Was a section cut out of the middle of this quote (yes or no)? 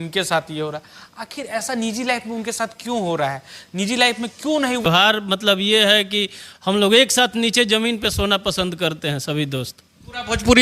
yes